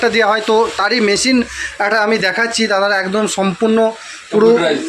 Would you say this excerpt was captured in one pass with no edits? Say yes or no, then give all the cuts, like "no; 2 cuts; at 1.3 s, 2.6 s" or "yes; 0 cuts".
yes; 0 cuts